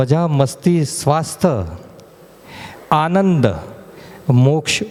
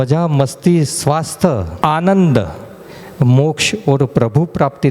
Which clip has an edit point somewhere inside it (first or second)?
second